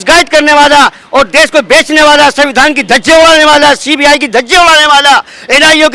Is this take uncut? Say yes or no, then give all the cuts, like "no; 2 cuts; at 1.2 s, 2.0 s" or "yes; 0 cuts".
yes; 0 cuts